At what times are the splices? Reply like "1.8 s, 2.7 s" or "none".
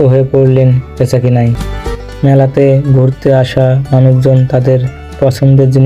1.7 s